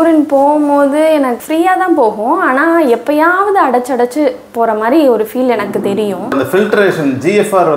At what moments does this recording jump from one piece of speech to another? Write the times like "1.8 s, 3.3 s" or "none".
1.4 s, 6.3 s